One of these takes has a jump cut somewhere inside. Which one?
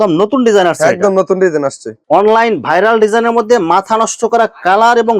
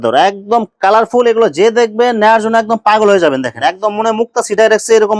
first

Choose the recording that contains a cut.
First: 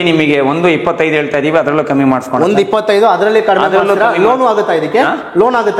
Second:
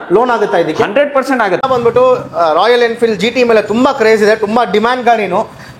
second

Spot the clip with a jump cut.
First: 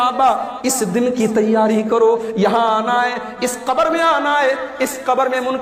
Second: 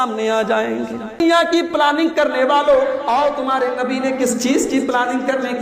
second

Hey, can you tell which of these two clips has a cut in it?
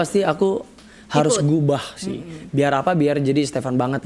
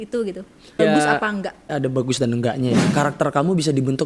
second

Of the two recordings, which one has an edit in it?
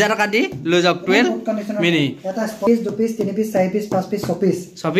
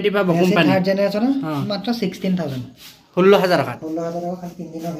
first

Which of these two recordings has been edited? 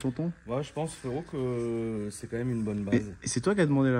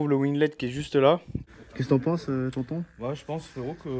second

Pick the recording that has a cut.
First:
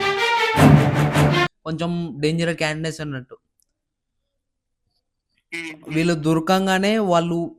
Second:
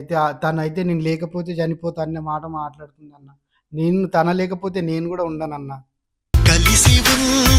first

